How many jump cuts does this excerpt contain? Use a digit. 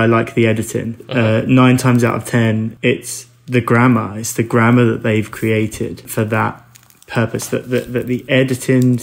3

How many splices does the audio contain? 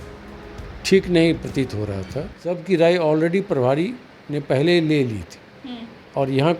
1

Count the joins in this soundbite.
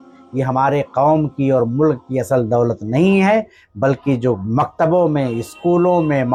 0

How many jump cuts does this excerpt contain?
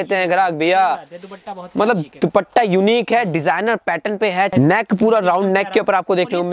1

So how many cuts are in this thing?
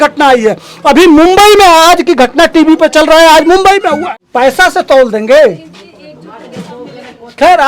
1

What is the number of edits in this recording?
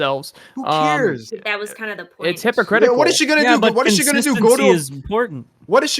1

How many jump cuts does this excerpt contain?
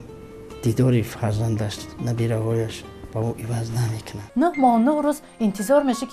1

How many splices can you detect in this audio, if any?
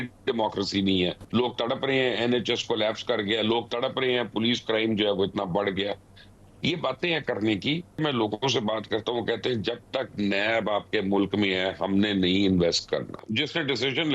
3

